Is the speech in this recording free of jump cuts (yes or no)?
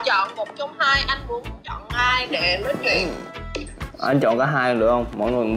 yes